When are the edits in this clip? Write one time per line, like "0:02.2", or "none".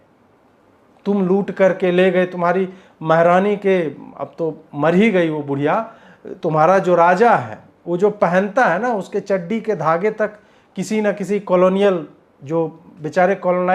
none

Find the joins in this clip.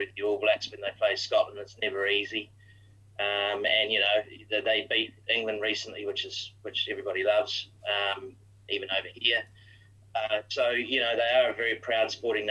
none

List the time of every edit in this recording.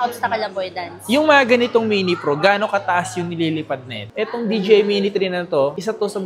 0:04.1

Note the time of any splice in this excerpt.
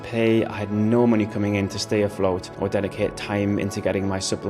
0:02.5

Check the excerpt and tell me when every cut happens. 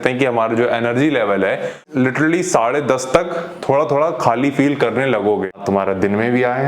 0:01.8
0:05.6

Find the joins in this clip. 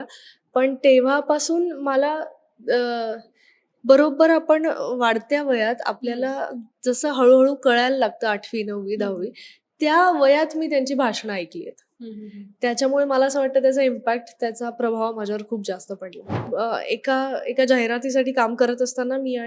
0:16.4

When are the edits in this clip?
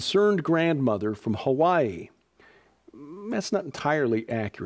0:01.5

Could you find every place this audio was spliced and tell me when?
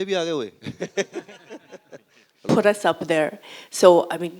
0:02.5

